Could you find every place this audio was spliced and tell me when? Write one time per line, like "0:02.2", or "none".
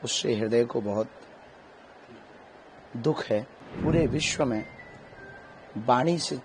0:03.6